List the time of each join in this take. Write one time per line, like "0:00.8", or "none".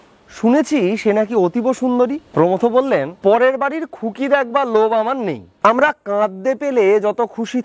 0:02.2
0:03.1
0:05.5